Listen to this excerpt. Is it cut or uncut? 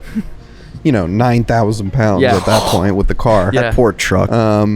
uncut